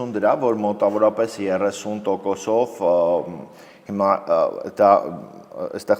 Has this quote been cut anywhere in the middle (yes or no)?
no